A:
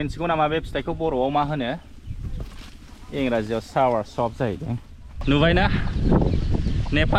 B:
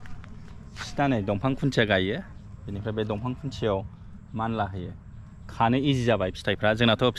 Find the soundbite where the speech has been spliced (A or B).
A